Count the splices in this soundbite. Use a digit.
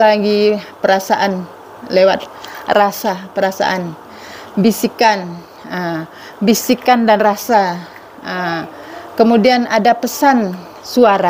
0